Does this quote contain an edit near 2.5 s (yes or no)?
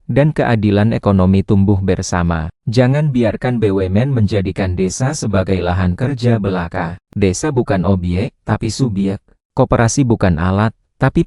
yes